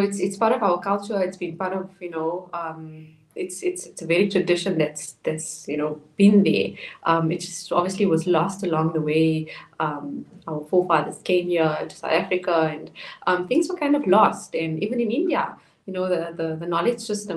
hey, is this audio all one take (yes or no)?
yes